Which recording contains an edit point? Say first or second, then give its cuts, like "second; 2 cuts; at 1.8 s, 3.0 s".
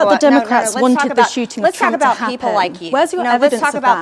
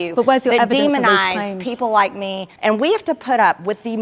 second; 1 cut; at 2.5 s